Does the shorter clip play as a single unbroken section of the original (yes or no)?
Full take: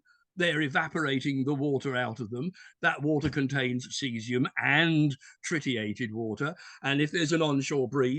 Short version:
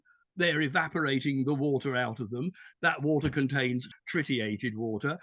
no